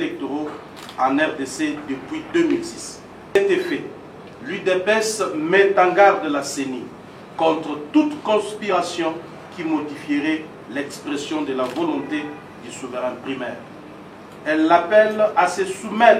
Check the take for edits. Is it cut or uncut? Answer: cut